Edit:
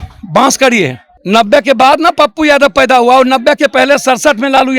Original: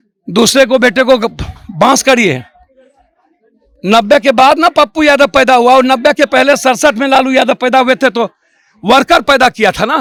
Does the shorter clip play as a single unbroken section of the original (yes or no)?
no